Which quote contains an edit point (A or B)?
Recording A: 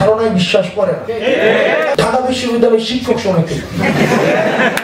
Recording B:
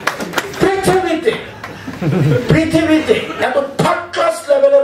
A